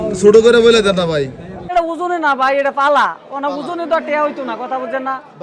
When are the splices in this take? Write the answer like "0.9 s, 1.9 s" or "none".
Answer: 1.5 s